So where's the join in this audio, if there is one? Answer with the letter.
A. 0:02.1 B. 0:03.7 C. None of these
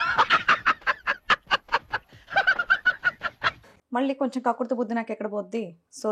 B